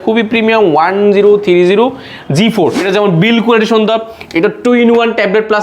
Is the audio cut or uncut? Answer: cut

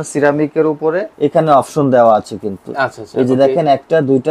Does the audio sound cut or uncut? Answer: cut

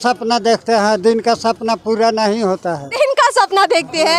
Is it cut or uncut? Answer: uncut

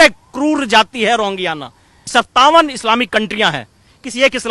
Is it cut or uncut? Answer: cut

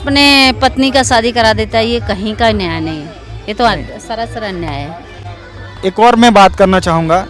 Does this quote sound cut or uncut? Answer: uncut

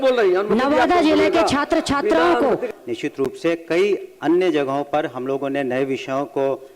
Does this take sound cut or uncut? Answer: cut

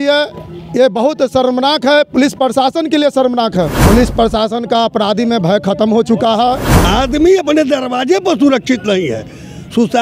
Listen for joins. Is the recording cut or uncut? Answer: cut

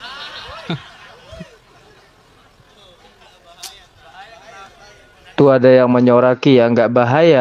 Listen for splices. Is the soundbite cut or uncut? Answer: cut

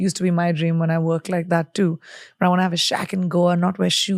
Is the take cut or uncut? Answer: uncut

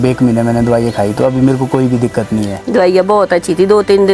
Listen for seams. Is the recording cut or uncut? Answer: cut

